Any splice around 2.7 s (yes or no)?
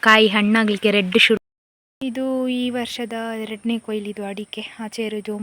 no